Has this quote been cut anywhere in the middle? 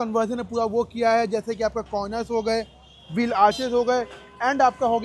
no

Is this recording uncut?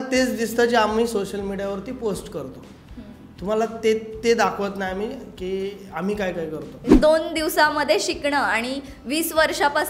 no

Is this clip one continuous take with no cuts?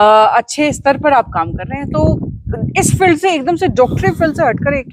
yes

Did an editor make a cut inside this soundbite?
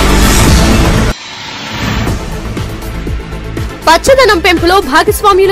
yes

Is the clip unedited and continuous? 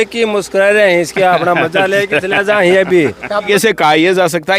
no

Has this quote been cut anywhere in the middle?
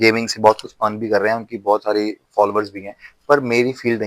no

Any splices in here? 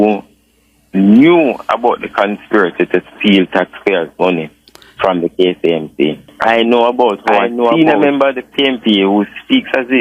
yes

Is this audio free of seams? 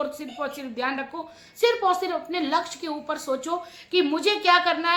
yes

